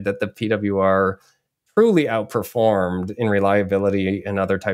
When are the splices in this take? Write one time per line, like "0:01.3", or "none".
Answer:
none